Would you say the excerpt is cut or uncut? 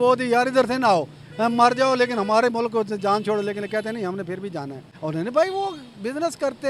cut